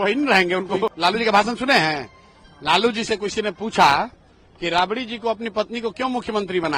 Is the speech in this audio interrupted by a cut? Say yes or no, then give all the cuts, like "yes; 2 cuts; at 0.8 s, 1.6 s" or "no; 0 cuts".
yes; 1 cut; at 1.0 s